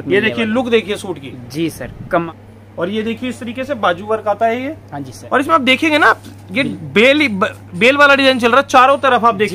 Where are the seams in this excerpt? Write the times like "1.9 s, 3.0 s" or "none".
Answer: 2.3 s

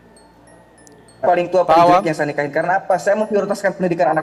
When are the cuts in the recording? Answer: none

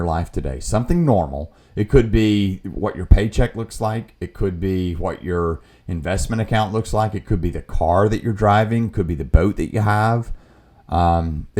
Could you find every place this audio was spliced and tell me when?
none

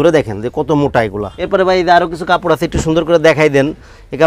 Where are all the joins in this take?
1.3 s

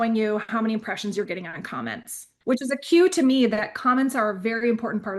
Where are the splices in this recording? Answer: 2.3 s

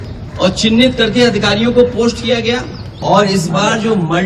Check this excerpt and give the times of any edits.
2.9 s

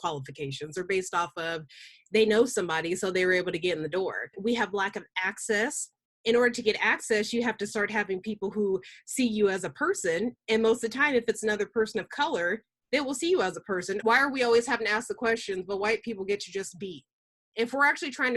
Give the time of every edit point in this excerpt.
4.4 s, 14.0 s

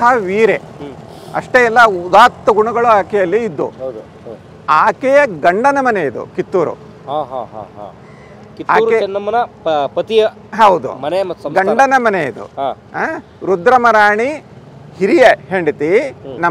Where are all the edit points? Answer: none

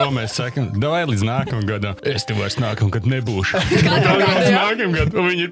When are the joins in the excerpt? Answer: 1.9 s

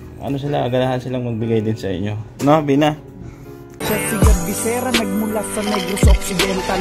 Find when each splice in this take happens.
4.0 s

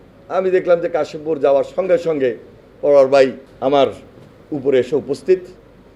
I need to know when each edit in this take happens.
3.5 s

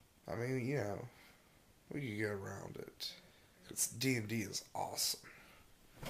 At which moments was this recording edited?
1.8 s

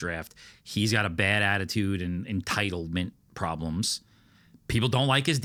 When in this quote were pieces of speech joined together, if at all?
none

